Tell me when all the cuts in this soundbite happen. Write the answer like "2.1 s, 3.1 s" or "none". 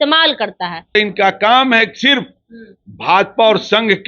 0.9 s